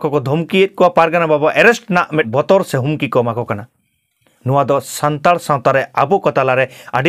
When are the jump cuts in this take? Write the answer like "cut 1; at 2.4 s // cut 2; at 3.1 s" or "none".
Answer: cut 1; at 2.3 s